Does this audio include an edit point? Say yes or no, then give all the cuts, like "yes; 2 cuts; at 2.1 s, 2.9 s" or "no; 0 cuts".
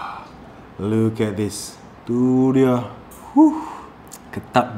yes; 1 cut; at 2.0 s